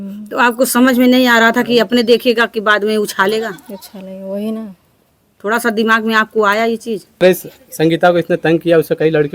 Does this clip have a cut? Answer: yes; 1 cut; at 7.2 s

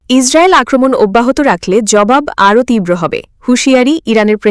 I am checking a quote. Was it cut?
no; 0 cuts

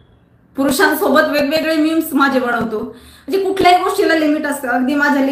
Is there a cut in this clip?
no; 0 cuts

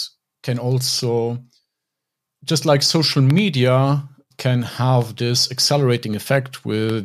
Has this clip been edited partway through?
no; 0 cuts

